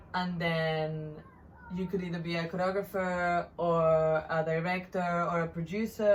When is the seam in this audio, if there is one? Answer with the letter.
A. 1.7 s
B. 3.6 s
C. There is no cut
C